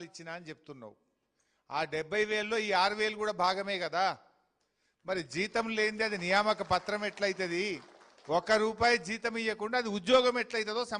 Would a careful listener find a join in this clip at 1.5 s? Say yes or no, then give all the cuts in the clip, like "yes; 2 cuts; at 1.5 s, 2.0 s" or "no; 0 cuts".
no; 0 cuts